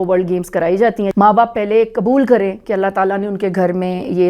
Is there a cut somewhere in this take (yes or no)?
yes